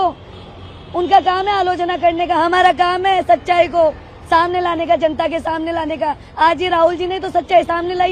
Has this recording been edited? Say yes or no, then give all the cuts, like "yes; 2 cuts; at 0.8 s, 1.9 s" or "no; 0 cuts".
no; 0 cuts